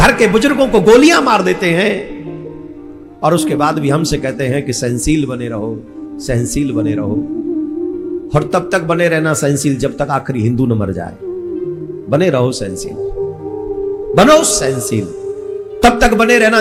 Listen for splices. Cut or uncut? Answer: uncut